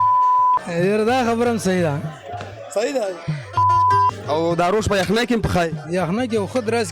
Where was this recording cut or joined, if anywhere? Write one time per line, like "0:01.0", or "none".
0:05.8